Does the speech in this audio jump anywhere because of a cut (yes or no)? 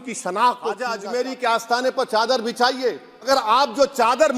yes